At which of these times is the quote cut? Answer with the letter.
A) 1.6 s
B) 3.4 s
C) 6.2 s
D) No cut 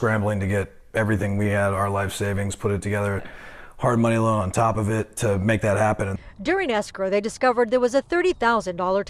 C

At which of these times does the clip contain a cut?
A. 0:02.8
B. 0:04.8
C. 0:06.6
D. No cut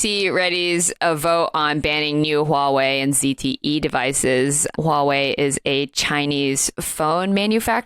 B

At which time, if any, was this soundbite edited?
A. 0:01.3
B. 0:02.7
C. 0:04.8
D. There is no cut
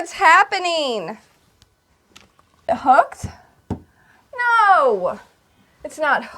B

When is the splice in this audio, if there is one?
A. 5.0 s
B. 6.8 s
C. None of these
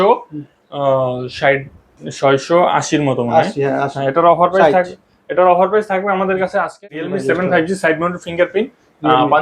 B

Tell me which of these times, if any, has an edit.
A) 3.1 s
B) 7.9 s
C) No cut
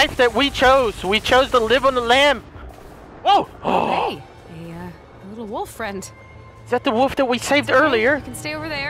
A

